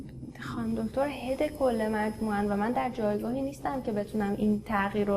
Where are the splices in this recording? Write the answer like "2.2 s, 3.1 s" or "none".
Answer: none